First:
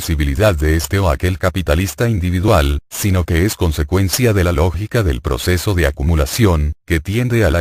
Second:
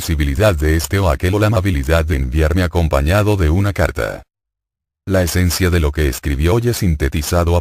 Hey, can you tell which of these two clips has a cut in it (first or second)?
first